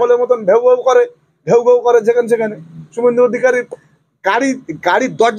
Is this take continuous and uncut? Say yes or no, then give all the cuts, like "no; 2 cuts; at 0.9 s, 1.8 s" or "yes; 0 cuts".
yes; 0 cuts